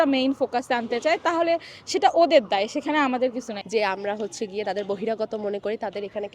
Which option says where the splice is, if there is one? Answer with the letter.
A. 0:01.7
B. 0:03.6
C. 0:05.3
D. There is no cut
B